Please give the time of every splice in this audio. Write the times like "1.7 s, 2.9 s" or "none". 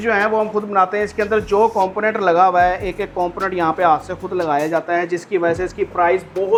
none